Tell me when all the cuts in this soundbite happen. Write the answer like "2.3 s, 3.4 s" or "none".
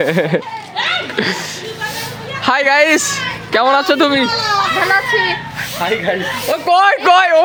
none